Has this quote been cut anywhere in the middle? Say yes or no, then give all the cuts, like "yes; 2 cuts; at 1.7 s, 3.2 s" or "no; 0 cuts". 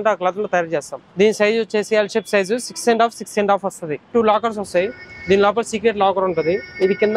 yes; 2 cuts; at 1.0 s, 4.1 s